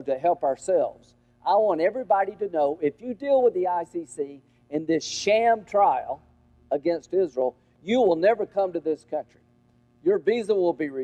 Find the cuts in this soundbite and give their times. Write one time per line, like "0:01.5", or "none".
none